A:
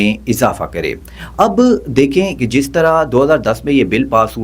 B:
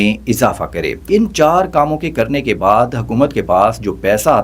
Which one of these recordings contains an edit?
B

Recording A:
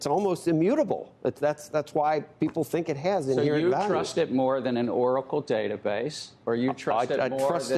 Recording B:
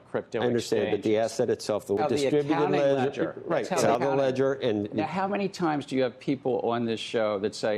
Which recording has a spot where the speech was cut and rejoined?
B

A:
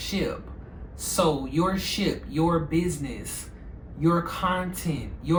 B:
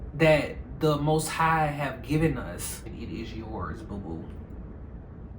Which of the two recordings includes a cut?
B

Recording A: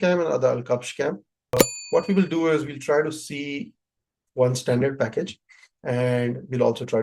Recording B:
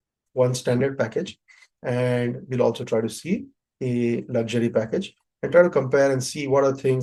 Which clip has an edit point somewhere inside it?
A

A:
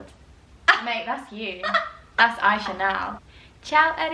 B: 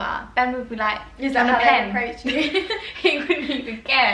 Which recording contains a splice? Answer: A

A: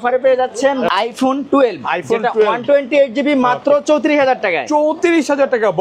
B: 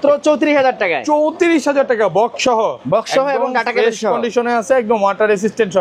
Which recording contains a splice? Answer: A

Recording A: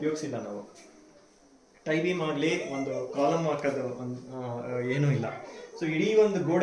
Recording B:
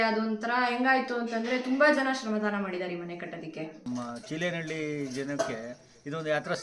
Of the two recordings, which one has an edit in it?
B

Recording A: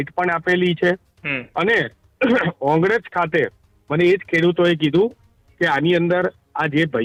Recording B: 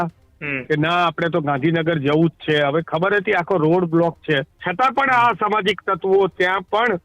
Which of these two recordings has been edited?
B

